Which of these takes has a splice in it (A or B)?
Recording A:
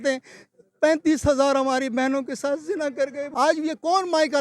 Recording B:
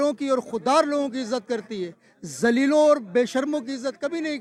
A